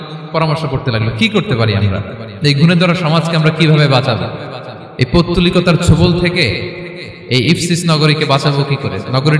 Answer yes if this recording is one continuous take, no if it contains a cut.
yes